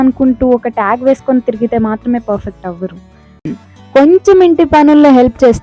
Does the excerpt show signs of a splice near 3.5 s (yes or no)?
yes